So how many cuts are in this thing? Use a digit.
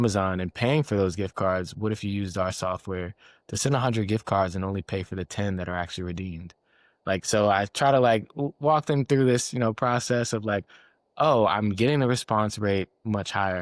0